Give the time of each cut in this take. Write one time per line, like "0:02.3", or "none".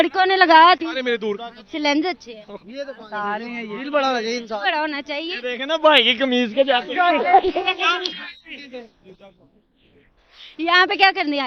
0:01.4

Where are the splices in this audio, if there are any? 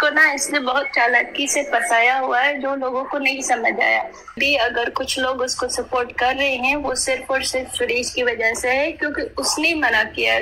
0:04.4

